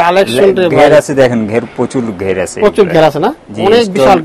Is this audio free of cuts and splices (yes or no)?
yes